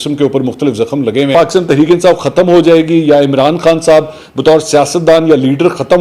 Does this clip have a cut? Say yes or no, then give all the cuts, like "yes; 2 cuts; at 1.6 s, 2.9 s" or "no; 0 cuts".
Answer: yes; 1 cut; at 1.3 s